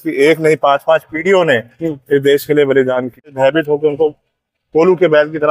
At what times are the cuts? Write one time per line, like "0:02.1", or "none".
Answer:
0:03.3